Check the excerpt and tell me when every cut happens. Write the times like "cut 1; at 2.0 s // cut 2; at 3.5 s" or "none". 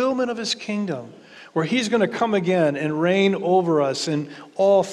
none